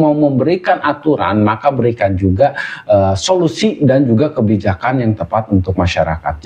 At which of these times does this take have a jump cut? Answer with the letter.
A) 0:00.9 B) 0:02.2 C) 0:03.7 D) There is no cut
D